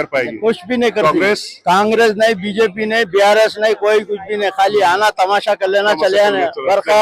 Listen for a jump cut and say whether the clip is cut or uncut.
uncut